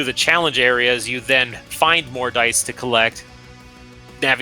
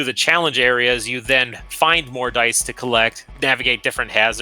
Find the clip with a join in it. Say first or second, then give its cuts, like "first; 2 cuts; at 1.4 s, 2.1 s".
second; 1 cut; at 3.2 s